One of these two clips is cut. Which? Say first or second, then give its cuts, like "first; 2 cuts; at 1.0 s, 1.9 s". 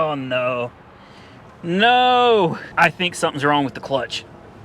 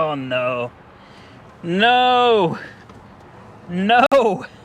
first; 1 cut; at 2.6 s